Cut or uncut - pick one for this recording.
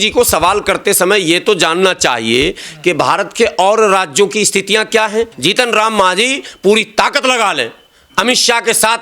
cut